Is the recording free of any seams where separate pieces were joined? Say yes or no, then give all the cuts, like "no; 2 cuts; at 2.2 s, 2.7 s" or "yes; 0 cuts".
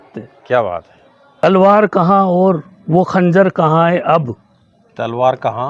no; 1 cut; at 1.2 s